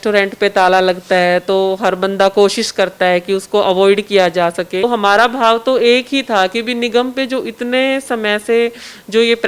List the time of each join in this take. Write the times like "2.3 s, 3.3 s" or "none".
4.8 s